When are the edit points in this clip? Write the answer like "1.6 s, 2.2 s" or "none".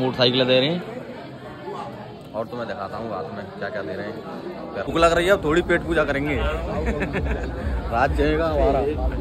4.9 s